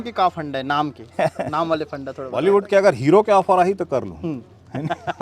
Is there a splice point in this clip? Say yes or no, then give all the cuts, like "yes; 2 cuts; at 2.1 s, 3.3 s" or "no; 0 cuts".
yes; 1 cut; at 2.2 s